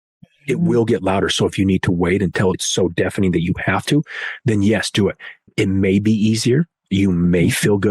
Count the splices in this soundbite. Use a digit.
1